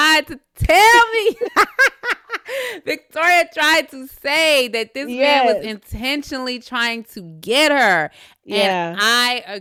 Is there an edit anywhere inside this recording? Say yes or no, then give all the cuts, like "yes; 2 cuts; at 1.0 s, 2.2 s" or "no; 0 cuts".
no; 0 cuts